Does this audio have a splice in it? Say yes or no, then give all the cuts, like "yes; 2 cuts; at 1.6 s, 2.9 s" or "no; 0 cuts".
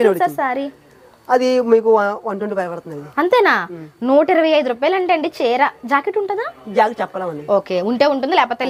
no; 0 cuts